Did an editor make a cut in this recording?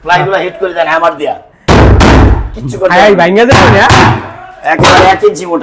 no; 0 cuts

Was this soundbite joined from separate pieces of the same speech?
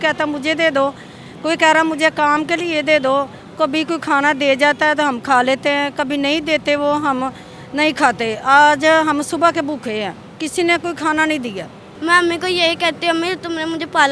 yes; 2 cuts; at 3.4 s, 11.9 s

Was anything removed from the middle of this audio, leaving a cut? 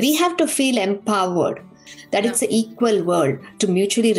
yes; 1 cut; at 1.9 s

